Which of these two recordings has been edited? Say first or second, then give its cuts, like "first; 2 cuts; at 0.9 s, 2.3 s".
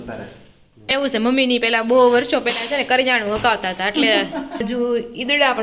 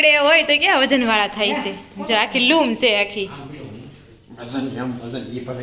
first; 2 cuts; at 0.9 s, 4.6 s